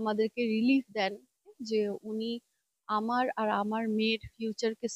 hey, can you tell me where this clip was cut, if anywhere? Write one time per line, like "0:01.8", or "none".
0:01.6